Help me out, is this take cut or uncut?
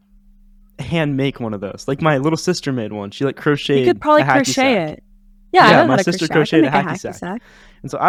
uncut